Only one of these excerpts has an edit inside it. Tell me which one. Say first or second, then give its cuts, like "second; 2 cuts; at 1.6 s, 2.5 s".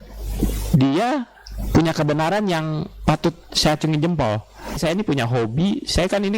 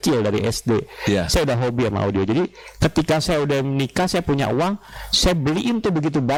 first; 1 cut; at 4.8 s